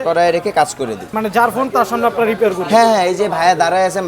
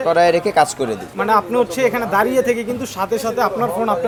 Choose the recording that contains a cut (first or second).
first